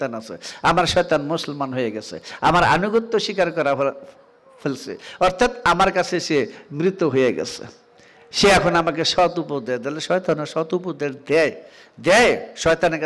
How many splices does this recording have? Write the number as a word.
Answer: zero